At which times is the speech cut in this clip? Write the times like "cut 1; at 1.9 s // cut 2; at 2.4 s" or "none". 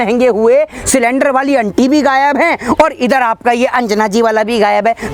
none